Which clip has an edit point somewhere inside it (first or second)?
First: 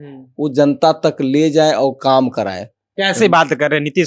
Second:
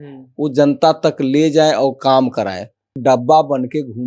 second